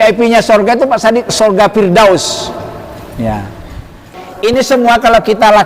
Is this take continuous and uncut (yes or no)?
no